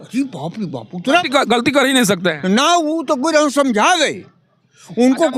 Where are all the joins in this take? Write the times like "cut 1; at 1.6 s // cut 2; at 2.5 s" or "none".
none